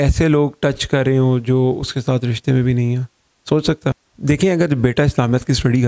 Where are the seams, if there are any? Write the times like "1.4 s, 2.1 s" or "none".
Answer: none